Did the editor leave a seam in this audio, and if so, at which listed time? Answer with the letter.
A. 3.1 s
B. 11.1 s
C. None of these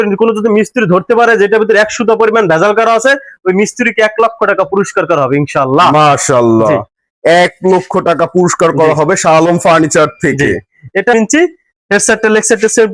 B